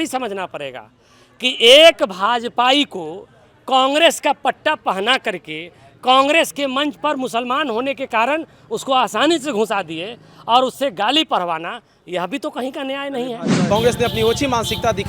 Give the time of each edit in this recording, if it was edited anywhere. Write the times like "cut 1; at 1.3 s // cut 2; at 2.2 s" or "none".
cut 1; at 13.6 s